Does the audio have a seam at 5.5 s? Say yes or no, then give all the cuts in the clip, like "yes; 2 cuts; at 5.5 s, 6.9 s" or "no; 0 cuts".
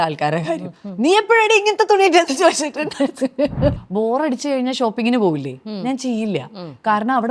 no; 1 cut; at 3.8 s